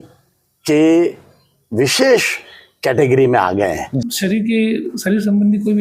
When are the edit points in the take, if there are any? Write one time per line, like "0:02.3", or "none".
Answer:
0:04.0